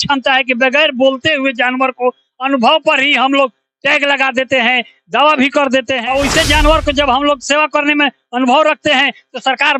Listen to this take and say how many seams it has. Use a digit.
1